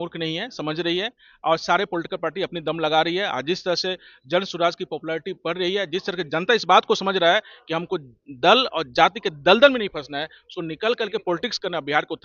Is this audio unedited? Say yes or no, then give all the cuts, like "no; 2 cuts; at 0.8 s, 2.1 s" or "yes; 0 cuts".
yes; 0 cuts